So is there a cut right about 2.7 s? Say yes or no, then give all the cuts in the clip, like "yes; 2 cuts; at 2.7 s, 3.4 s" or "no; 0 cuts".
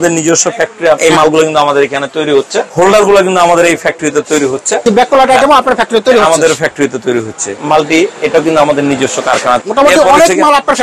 yes; 5 cuts; at 1.0 s, 2.7 s, 4.9 s, 7.5 s, 9.6 s